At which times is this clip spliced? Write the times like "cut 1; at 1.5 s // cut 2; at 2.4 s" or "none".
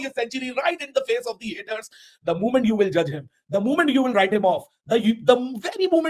none